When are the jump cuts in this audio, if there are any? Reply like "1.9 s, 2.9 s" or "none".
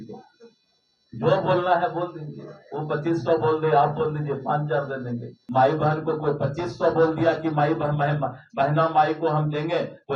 5.3 s